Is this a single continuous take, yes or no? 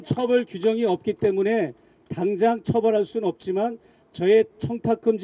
yes